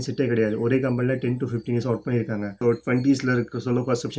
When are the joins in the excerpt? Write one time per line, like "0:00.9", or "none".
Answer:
0:02.5